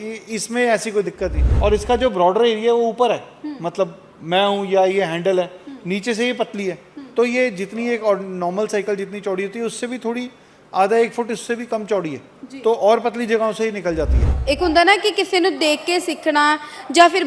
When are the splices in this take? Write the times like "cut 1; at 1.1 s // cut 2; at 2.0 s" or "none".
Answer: cut 1; at 1.4 s // cut 2; at 14.3 s